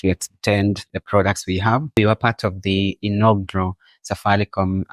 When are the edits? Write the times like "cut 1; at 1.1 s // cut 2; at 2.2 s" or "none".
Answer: cut 1; at 1.9 s